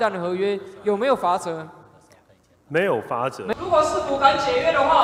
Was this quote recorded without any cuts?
no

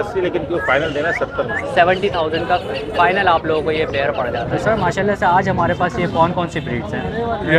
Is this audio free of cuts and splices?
no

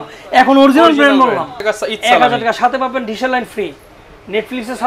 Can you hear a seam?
yes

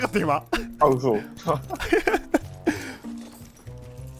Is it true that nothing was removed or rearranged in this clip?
yes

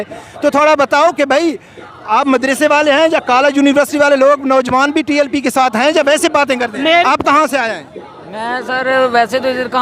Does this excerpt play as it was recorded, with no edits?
no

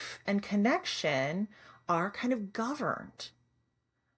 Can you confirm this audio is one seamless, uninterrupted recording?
yes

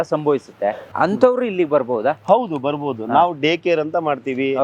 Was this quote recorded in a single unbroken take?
no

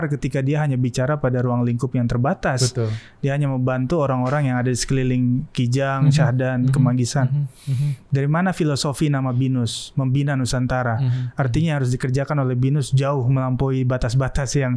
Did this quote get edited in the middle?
no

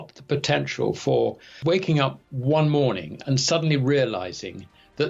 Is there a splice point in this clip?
yes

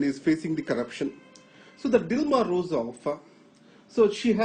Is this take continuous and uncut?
yes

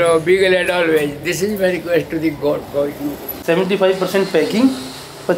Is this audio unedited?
no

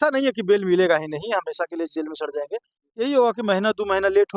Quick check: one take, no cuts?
yes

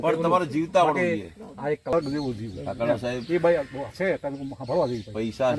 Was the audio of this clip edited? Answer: no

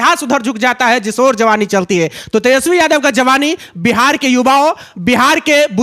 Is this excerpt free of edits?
yes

